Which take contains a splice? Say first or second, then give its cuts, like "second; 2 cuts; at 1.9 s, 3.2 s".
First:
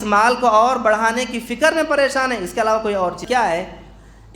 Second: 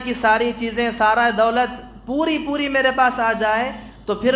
first; 1 cut; at 3.2 s